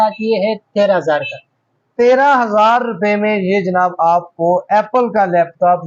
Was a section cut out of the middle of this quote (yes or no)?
no